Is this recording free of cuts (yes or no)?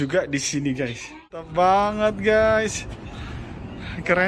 no